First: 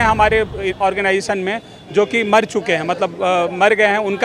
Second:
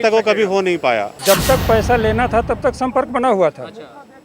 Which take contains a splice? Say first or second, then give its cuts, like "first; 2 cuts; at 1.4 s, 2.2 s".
second; 1 cut; at 1.1 s